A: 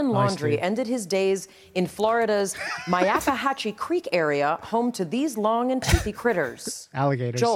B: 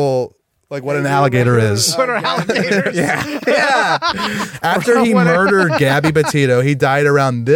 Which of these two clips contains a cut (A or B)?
B